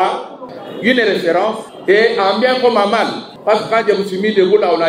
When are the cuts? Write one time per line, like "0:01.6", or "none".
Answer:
0:01.7
0:03.3